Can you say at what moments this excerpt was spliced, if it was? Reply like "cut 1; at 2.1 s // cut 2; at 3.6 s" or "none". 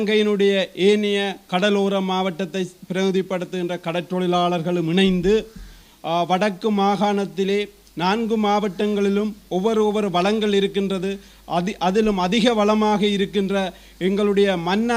none